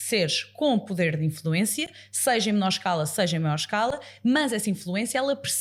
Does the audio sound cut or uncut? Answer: uncut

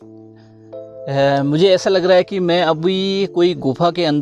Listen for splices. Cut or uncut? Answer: uncut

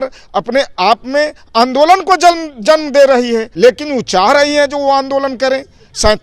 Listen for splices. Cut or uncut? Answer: cut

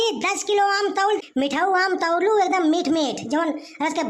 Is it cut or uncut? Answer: cut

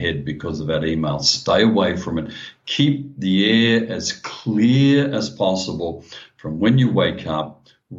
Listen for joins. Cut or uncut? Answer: uncut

